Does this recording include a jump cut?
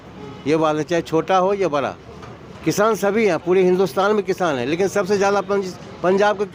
no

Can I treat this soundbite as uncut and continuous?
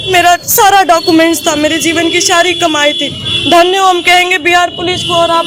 yes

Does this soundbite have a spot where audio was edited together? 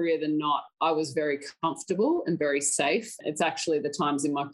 yes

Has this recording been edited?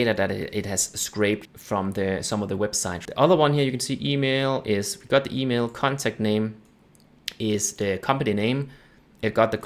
yes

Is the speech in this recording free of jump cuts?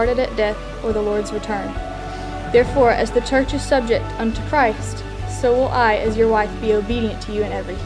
yes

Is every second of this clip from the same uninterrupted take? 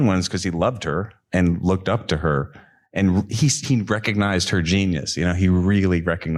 yes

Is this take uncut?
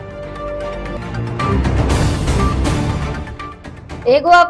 no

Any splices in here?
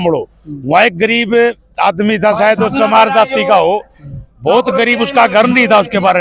no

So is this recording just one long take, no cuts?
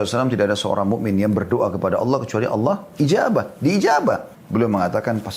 no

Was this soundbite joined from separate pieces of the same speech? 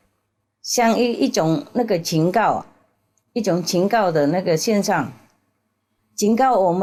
no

